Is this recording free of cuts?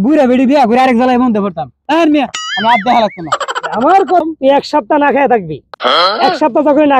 no; 1 cut; at 4.2 s

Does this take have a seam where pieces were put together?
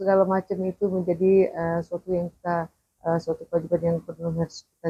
no; 0 cuts

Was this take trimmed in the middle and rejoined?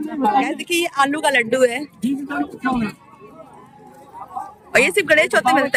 no; 0 cuts

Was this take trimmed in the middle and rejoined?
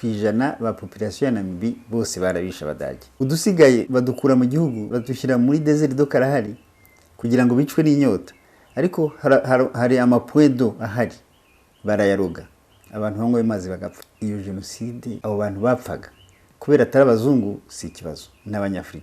yes; 5 cuts; at 3.0 s, 3.9 s, 4.9 s, 14.1 s, 15.2 s

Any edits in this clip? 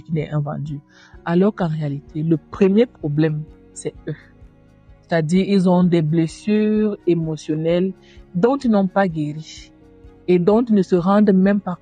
no; 0 cuts

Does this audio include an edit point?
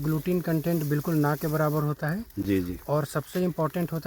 no; 0 cuts

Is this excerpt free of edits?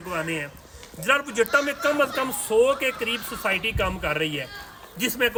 yes; 0 cuts

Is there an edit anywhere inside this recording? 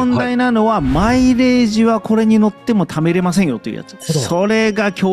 no; 0 cuts

